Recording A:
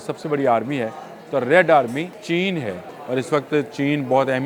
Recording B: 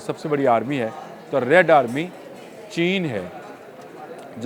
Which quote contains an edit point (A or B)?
A